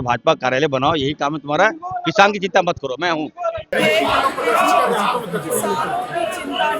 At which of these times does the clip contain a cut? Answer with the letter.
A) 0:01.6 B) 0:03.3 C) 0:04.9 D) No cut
D